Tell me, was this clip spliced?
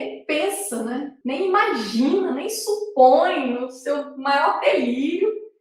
yes; 1 cut; at 1.1 s

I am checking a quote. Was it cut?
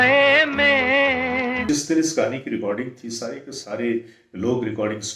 yes; 1 cut; at 1.7 s

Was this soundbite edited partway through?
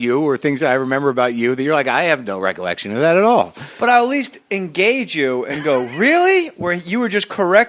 no; 0 cuts

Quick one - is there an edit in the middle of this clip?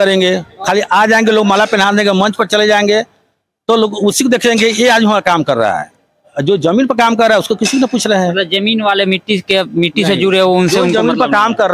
no; 0 cuts

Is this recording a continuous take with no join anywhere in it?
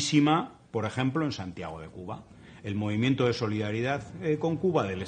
no; 1 cut; at 1.2 s

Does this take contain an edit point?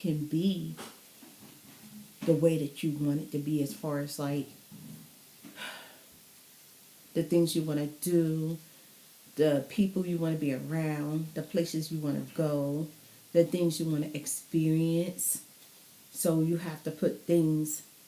no; 0 cuts

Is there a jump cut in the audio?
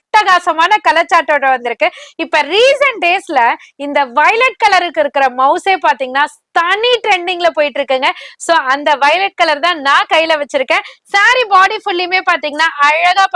no; 0 cuts

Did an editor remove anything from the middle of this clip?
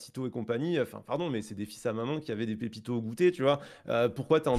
no; 0 cuts

